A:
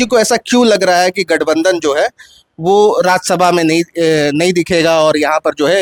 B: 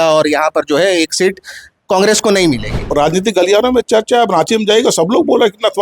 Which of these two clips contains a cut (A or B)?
B